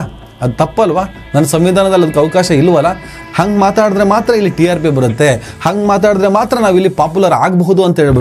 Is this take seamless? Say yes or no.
no